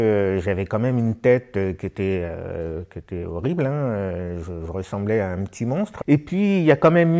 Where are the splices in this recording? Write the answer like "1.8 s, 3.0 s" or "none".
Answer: 5.9 s